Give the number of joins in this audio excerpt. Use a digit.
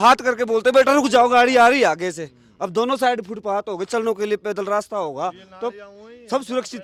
0